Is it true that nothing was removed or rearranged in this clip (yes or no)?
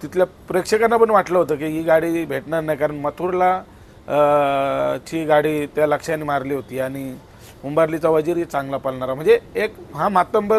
yes